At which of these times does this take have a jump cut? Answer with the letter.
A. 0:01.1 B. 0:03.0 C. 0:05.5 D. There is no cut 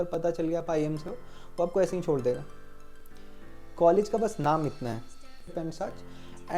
C